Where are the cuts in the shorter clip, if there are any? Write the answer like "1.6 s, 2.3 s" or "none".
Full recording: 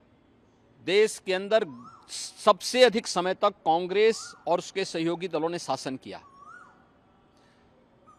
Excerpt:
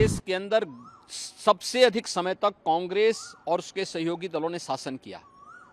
none